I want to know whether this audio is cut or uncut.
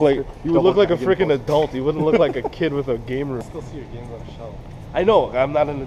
cut